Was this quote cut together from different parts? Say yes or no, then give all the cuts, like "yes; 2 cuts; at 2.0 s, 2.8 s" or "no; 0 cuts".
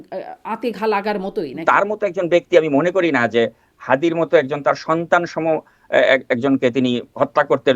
yes; 1 cut; at 1.6 s